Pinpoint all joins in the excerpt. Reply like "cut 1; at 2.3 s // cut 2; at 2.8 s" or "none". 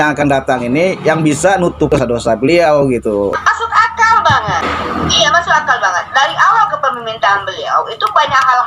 cut 1; at 1.9 s // cut 2; at 3.4 s // cut 3; at 4.7 s